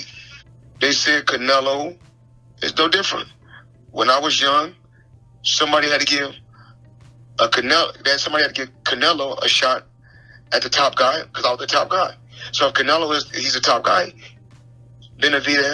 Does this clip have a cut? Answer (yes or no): no